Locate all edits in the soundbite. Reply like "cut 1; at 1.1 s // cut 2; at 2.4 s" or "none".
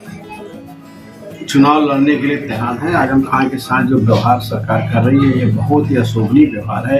cut 1; at 2.7 s